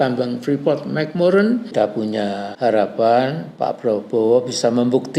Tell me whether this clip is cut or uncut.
cut